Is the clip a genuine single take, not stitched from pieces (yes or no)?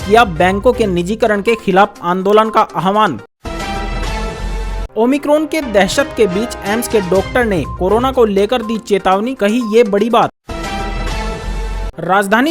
no